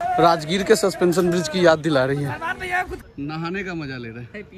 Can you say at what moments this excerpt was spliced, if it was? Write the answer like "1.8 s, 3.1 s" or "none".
3.0 s